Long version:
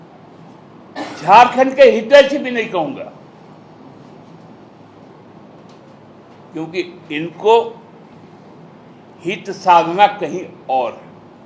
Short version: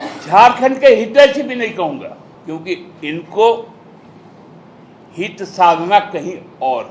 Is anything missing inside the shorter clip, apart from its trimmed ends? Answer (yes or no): yes